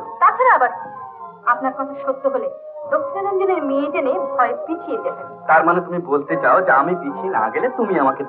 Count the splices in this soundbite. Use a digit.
0